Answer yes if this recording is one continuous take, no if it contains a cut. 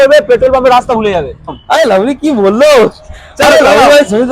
no